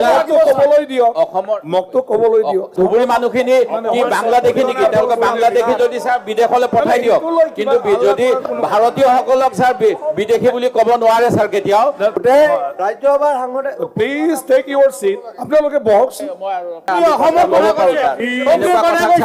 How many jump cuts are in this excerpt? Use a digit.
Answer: 3